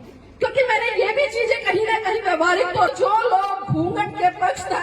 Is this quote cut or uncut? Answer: cut